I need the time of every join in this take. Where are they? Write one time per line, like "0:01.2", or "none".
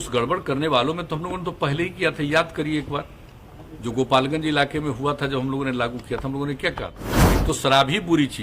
0:07.4